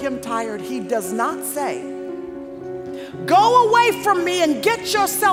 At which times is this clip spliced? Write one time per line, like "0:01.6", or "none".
none